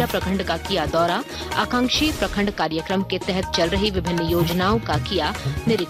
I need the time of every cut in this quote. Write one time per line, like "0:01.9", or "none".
none